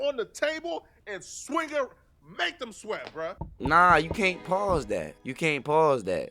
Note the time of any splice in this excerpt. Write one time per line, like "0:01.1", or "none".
0:03.4
0:05.2